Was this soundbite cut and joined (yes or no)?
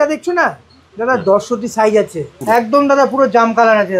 yes